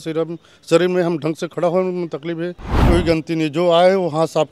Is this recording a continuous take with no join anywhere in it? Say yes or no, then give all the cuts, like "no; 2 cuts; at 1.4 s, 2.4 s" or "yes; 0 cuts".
no; 1 cut; at 2.8 s